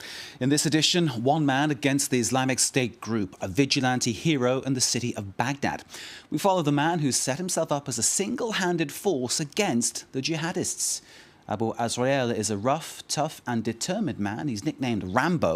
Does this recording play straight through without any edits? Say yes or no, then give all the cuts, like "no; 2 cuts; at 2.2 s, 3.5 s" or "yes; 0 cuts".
no; 1 cut; at 10.4 s